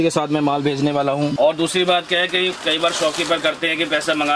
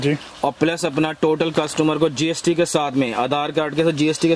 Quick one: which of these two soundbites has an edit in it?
first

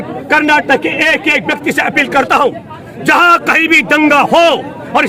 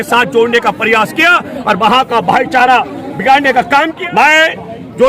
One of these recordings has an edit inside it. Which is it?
second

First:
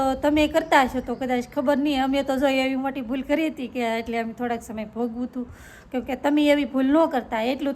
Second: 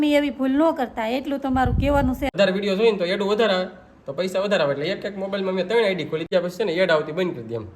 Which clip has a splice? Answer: second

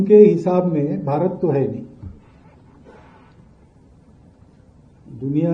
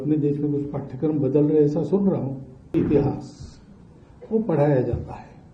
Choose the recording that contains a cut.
second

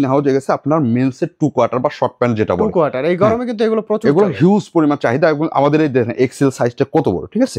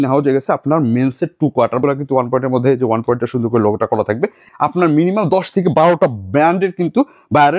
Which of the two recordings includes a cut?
second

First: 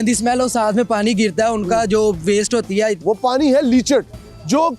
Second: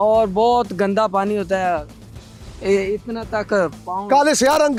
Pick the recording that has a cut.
first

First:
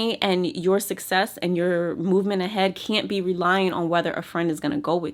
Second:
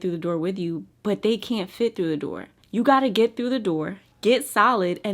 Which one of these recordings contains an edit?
second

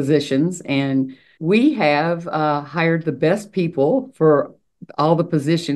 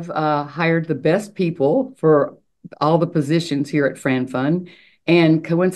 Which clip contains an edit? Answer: first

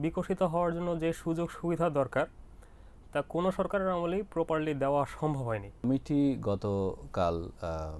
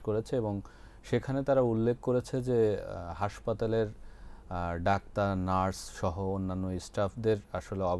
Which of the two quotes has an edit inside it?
first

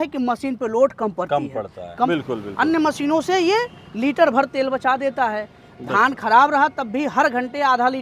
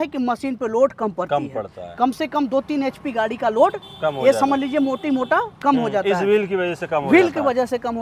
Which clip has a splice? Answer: first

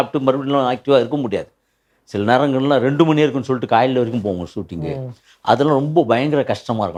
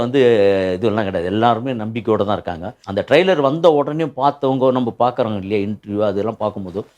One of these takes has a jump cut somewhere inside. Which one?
second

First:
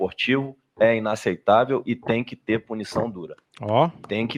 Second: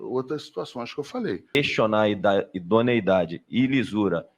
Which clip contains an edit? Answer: second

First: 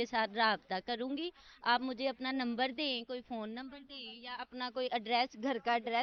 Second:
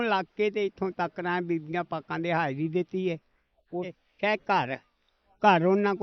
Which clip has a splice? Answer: second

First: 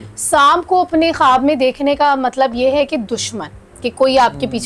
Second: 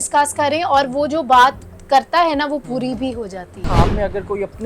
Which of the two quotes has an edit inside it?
second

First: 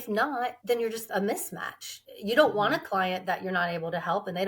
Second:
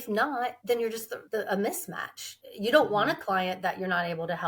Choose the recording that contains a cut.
first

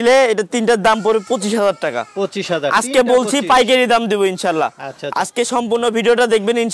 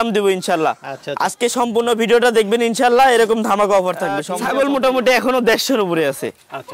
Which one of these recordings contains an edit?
second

